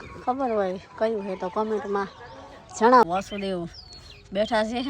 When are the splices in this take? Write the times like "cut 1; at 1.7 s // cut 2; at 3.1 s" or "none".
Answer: cut 1; at 3.0 s